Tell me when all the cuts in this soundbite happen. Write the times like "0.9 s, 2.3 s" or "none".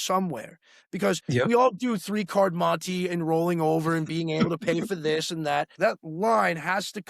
5.7 s

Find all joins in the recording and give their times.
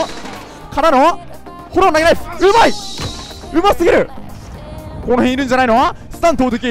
4.3 s

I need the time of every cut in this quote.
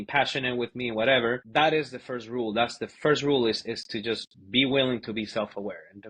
1.4 s

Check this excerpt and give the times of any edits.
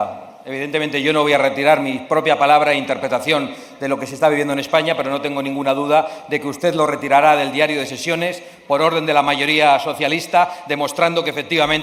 none

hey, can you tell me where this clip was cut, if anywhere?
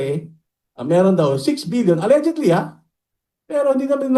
none

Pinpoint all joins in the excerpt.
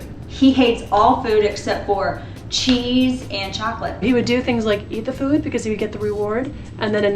4.0 s

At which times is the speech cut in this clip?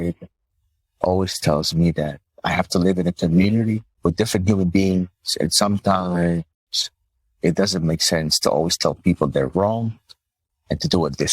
3.9 s

